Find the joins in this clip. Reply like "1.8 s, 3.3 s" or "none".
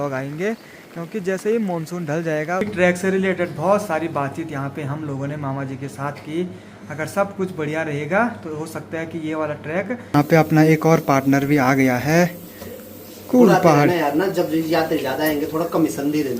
2.6 s, 10.0 s